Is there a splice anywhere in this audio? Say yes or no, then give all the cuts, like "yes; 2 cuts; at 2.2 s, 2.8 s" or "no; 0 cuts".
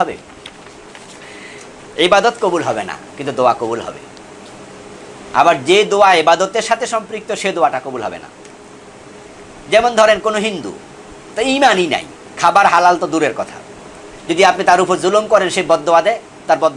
no; 0 cuts